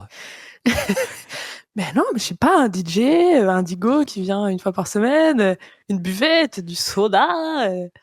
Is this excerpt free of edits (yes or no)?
yes